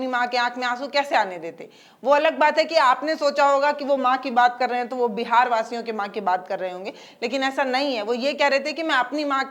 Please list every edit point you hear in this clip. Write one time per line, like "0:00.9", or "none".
none